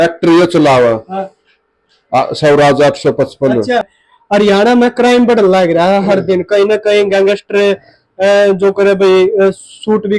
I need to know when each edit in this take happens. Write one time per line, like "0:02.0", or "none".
0:04.0